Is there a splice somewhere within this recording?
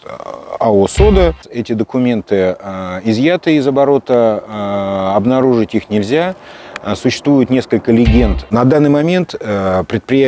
yes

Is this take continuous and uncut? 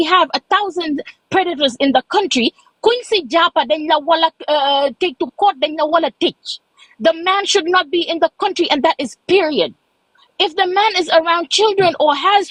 yes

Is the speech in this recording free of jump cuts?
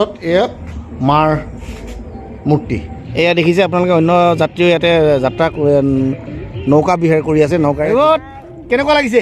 no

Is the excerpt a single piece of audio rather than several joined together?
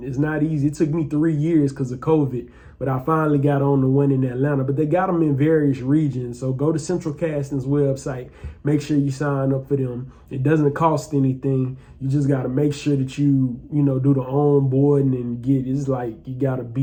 yes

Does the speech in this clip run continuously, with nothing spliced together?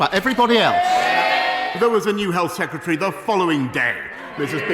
no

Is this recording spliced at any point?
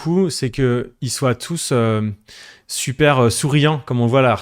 no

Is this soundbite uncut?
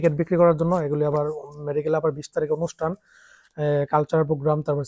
yes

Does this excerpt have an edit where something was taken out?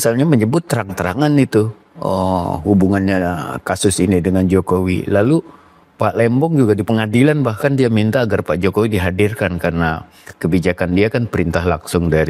no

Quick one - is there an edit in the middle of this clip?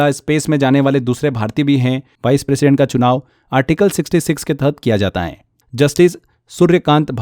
yes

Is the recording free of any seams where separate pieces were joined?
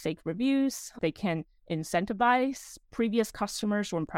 no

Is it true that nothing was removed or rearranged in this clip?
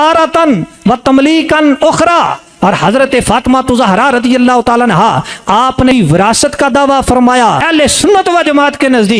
no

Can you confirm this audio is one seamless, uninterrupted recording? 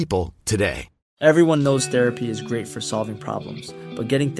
yes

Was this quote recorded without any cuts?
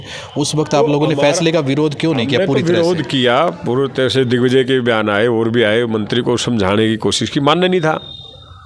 yes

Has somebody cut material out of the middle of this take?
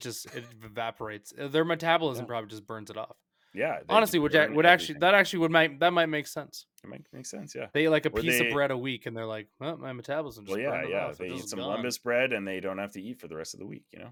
no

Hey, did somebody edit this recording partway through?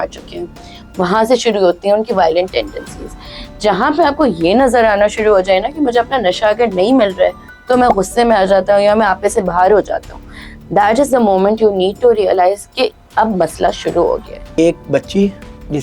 yes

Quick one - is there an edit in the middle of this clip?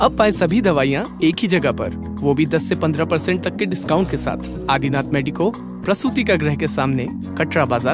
no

